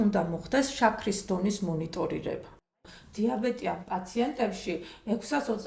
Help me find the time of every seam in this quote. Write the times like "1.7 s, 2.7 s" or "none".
2.7 s

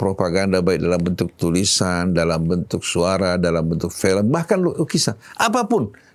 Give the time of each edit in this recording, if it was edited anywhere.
none

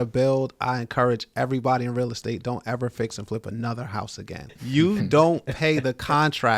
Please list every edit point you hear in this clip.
4.4 s

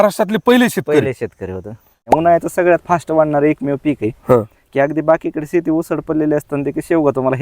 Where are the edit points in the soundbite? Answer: 2.0 s

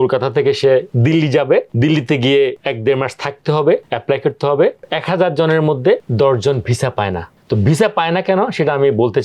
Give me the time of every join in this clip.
none

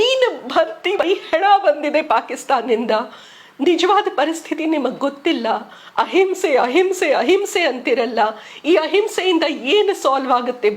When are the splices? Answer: 1.0 s

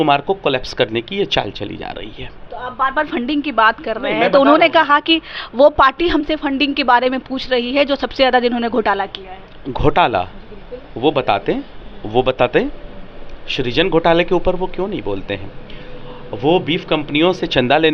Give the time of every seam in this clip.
none

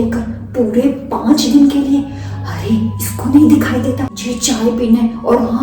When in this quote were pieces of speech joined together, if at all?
4.3 s

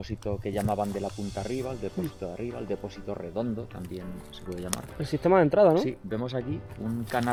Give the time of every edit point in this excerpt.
none

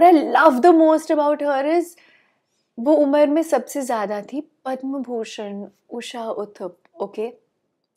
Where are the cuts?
none

